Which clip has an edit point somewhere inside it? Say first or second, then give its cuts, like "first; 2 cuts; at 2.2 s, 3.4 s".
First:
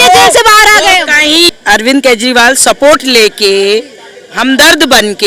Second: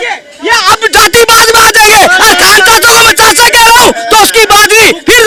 first; 1 cut; at 1.5 s